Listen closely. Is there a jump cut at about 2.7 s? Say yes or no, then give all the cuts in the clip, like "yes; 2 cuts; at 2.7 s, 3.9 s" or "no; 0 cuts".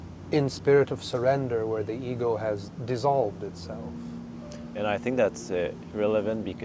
yes; 1 cut; at 2.7 s